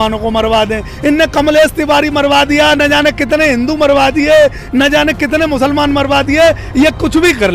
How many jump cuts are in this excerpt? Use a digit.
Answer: 0